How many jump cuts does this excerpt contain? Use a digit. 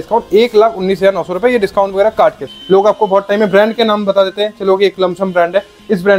1